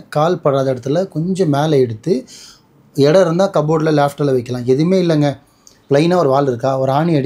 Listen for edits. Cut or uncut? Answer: uncut